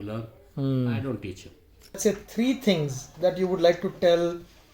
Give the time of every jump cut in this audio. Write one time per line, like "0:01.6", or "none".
0:02.0